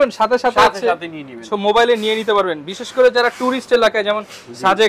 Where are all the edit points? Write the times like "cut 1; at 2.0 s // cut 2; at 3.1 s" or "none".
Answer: none